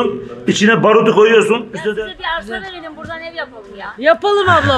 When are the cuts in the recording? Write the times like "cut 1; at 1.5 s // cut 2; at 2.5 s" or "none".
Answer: cut 1; at 1.8 s